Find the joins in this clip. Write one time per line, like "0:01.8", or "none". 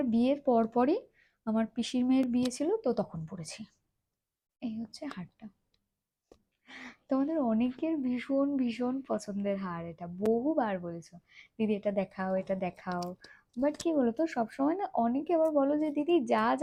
none